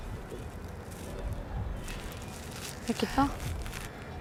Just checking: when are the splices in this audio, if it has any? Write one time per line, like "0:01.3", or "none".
none